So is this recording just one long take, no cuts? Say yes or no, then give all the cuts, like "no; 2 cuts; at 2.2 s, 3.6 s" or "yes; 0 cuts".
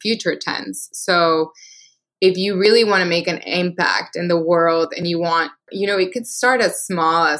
no; 1 cut; at 5.7 s